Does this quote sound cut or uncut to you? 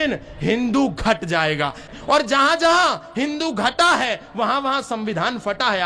cut